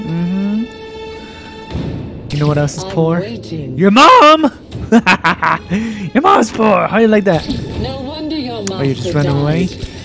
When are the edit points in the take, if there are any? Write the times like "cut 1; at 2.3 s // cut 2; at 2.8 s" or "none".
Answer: none